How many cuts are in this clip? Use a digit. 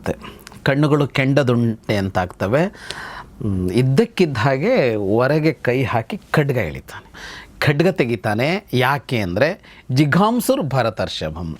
1